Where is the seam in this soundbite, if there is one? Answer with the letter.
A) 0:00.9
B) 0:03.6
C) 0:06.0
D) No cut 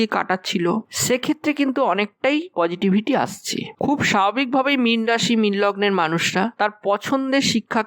B